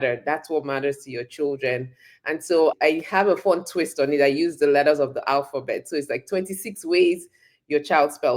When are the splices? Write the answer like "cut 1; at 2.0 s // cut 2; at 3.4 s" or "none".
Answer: cut 1; at 2.8 s